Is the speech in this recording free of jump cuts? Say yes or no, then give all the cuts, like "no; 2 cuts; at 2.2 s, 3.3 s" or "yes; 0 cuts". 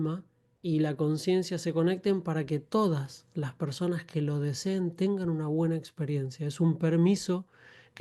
yes; 0 cuts